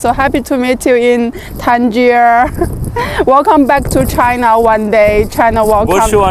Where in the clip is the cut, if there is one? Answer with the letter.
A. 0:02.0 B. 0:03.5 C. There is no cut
C